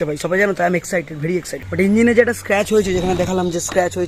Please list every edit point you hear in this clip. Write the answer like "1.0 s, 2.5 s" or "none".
1.7 s